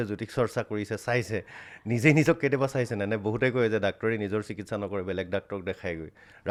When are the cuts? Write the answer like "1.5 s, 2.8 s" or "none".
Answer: none